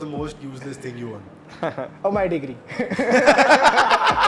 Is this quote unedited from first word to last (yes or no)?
yes